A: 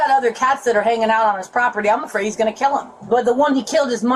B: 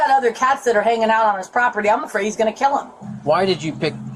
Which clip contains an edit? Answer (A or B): B